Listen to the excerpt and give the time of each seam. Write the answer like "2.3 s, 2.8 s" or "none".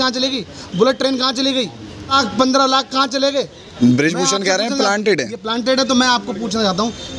2.1 s, 3.6 s